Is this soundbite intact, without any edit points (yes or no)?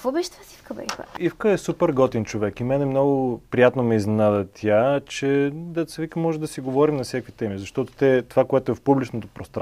no